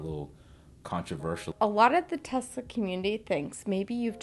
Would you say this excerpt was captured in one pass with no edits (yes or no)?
no